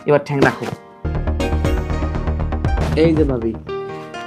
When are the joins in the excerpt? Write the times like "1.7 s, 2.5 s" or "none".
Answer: 1.1 s, 2.8 s